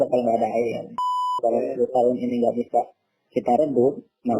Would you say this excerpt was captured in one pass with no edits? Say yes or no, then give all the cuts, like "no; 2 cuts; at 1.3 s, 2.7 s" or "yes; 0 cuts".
no; 1 cut; at 1.4 s